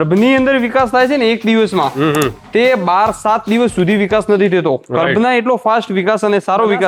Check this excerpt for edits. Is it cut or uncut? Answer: uncut